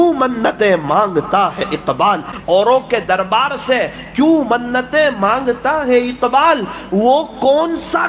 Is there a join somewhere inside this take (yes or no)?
yes